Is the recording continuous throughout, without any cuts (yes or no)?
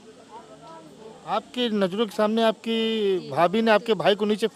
yes